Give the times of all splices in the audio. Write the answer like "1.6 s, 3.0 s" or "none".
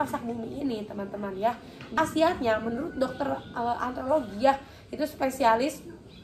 2.0 s